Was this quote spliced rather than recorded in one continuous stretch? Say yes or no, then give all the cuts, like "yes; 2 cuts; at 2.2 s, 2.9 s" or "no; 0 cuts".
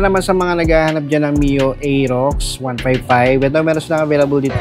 no; 0 cuts